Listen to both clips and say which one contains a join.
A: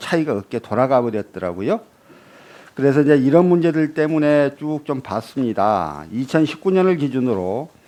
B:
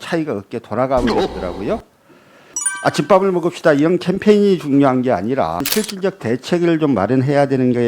B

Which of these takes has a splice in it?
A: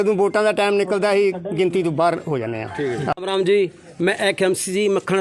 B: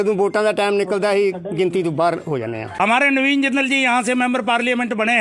B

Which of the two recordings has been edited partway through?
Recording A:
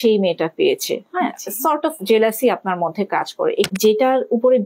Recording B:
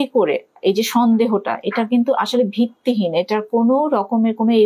A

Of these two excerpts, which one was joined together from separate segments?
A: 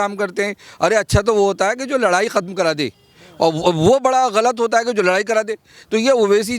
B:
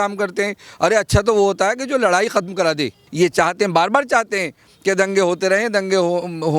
B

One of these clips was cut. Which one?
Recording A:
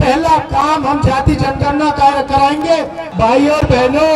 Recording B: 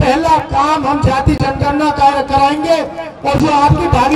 A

